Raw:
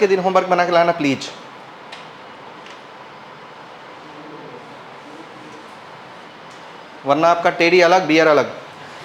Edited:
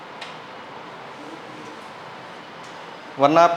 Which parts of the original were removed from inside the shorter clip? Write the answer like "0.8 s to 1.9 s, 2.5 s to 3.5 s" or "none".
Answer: 2.6 s to 4.8 s